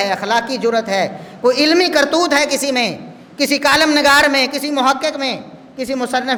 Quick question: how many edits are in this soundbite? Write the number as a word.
zero